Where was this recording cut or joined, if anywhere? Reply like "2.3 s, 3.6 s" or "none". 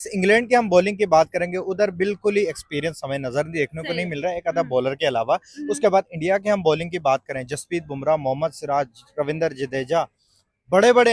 none